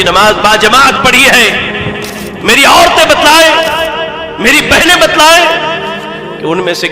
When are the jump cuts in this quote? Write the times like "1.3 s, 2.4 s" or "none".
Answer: none